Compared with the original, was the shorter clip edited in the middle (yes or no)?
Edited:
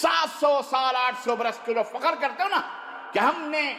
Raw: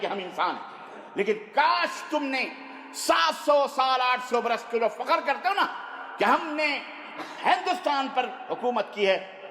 no